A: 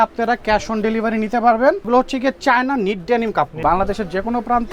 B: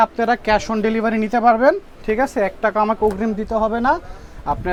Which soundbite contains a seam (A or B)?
A